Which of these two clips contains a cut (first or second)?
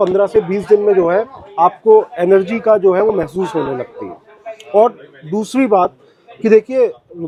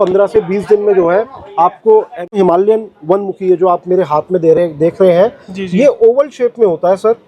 second